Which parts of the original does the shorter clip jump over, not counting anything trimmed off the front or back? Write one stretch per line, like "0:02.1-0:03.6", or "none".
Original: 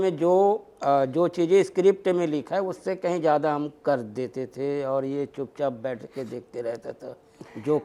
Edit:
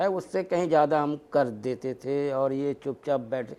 none

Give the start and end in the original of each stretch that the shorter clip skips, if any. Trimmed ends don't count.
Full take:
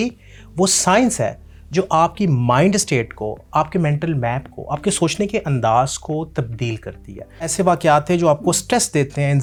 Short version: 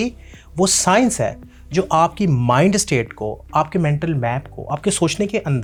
none

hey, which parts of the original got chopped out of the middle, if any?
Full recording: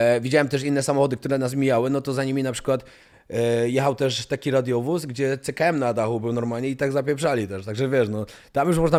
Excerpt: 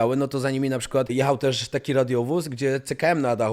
0:02.9-0:03.7

